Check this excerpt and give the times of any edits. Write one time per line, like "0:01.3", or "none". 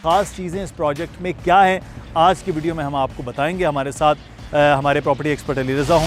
none